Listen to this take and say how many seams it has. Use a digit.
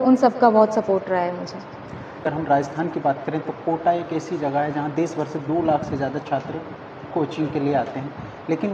0